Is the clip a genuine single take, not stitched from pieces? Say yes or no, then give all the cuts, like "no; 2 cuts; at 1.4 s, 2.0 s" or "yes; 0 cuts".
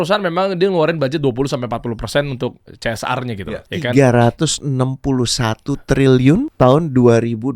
no; 2 cuts; at 3.6 s, 6.5 s